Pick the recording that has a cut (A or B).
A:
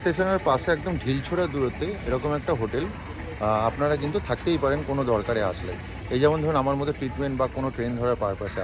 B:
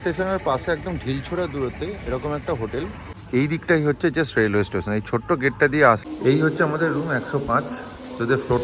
B